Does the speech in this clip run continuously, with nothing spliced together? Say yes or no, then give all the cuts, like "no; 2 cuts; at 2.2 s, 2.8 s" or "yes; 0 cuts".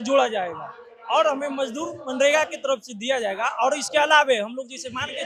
yes; 0 cuts